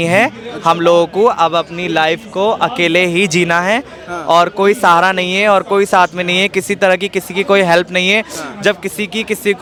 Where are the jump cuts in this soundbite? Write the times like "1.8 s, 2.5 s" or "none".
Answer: none